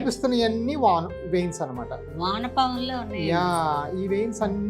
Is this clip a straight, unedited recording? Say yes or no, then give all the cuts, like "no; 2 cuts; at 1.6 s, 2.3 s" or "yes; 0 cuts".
yes; 0 cuts